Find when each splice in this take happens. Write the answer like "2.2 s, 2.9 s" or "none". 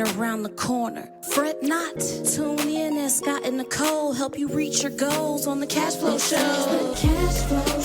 6.9 s